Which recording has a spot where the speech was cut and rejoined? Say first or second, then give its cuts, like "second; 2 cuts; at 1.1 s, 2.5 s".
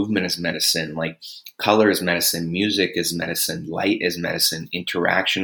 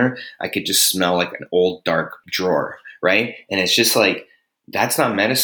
second; 1 cut; at 2.2 s